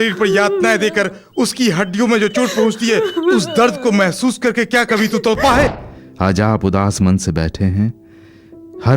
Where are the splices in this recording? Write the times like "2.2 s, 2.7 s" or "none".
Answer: 5.8 s